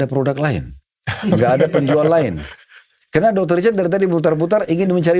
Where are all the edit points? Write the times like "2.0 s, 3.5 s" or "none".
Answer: none